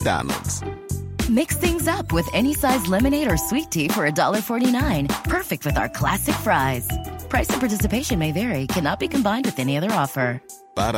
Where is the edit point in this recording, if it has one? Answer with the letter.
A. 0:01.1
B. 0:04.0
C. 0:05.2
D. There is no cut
D